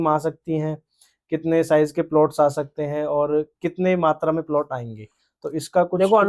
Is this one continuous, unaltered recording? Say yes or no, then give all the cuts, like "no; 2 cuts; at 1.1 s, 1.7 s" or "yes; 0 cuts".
yes; 0 cuts